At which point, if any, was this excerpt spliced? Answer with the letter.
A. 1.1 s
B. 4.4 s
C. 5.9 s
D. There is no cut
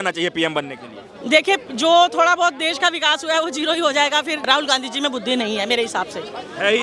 B